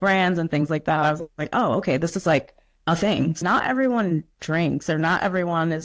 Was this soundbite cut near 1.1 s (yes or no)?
no